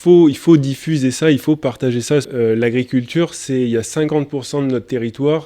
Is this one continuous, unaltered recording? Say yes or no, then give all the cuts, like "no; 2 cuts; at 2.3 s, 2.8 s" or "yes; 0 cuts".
no; 1 cut; at 2.3 s